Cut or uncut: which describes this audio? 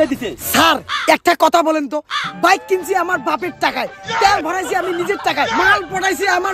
uncut